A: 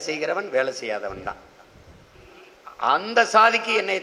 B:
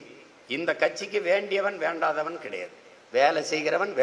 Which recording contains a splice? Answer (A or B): A